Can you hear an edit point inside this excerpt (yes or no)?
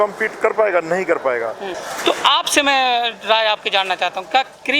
yes